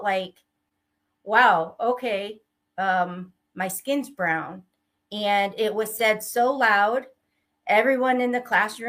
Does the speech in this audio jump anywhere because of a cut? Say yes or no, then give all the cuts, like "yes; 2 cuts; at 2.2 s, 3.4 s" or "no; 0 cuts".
no; 0 cuts